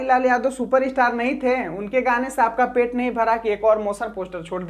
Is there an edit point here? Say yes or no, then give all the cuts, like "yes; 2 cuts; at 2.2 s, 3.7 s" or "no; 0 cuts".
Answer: no; 0 cuts